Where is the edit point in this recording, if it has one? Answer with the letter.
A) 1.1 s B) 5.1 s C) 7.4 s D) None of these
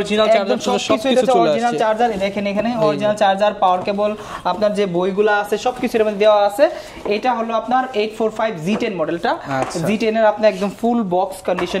D